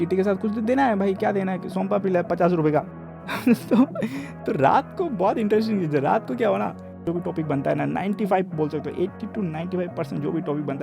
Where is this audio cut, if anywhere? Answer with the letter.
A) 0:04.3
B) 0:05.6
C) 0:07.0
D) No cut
C